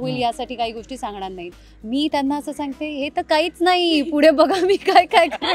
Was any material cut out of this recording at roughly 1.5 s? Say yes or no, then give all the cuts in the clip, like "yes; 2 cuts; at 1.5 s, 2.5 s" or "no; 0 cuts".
yes; 1 cut; at 1.5 s